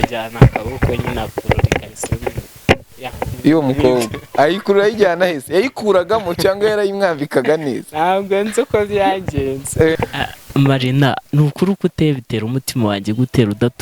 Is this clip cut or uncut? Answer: cut